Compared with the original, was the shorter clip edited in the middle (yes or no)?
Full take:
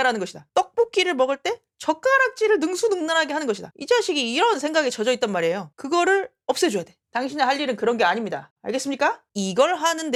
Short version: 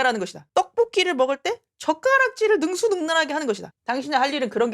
yes